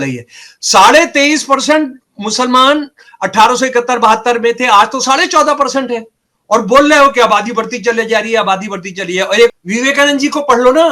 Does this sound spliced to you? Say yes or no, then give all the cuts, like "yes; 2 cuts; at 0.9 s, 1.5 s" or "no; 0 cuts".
yes; 1 cut; at 9.5 s